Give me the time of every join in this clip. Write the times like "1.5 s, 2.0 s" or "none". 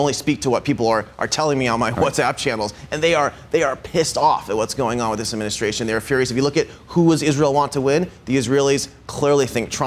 none